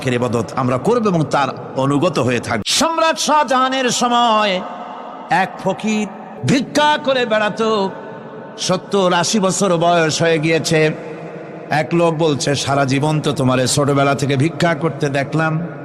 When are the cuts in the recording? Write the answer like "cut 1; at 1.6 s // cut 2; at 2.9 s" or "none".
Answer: cut 1; at 2.6 s // cut 2; at 6.3 s